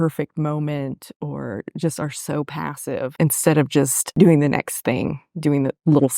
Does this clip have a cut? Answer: yes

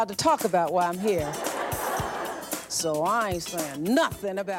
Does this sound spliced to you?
no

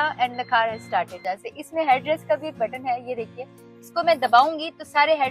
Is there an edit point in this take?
yes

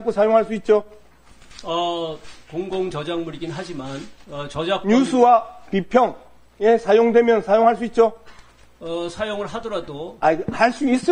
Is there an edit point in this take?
no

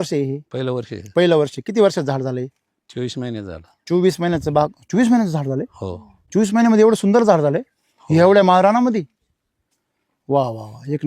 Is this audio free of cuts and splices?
yes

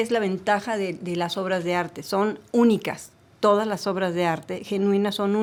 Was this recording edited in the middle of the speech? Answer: no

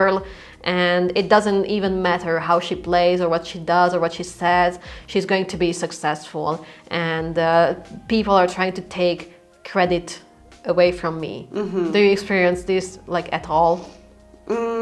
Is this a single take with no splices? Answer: yes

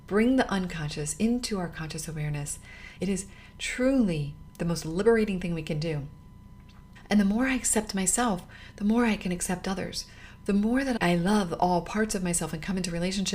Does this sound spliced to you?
yes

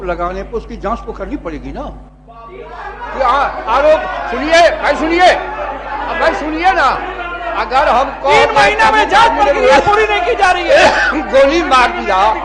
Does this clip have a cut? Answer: no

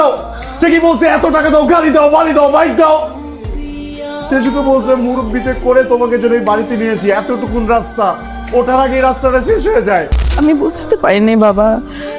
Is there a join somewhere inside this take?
yes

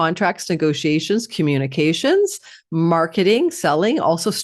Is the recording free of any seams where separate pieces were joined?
yes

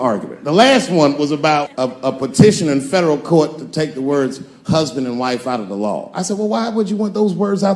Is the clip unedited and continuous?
no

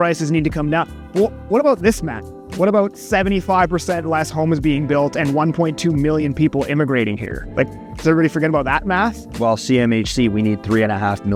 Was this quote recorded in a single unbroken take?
yes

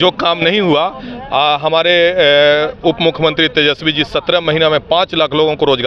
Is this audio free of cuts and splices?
yes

